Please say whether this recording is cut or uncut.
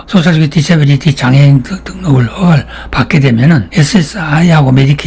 uncut